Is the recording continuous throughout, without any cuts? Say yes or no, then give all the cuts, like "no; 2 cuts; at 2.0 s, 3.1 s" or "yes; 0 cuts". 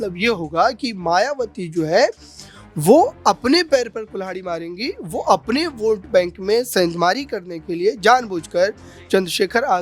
yes; 0 cuts